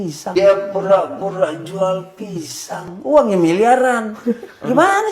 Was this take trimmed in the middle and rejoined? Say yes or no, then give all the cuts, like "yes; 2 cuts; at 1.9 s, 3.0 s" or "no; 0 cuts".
no; 0 cuts